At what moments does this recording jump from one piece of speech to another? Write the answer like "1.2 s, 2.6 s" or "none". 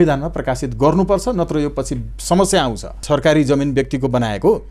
3.0 s